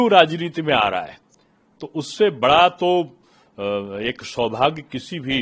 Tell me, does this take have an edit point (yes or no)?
no